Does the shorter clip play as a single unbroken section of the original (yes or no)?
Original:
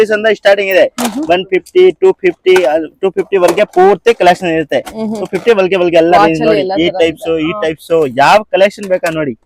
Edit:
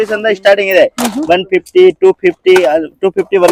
yes